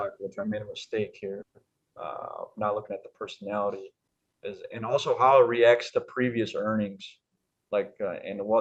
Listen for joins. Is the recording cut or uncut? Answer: uncut